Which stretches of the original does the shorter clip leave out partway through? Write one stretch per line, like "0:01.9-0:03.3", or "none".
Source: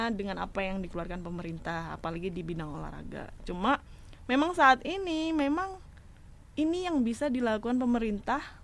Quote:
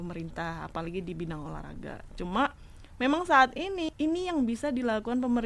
0:05.2-0:06.5